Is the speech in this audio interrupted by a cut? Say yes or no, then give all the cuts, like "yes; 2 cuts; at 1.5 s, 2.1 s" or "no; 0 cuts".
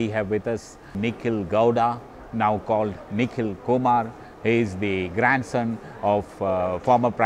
yes; 1 cut; at 0.9 s